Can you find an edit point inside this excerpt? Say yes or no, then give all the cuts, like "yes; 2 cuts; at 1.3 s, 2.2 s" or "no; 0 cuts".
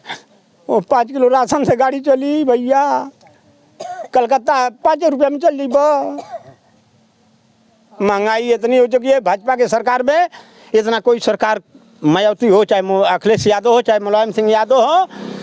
no; 0 cuts